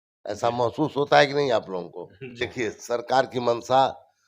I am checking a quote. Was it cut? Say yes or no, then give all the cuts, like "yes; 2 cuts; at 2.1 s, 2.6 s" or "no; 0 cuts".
yes; 1 cut; at 2.4 s